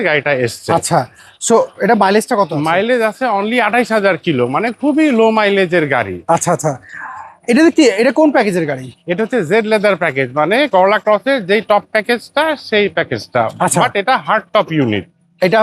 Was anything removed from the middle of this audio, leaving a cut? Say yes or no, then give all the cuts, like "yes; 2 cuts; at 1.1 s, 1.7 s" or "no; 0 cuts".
no; 0 cuts